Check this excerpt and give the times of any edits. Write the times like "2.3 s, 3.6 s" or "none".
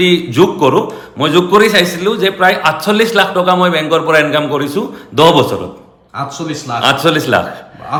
none